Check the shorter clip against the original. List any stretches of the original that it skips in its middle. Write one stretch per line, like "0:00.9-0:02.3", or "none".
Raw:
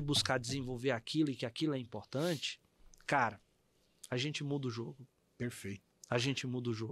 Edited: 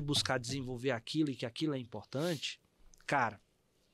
none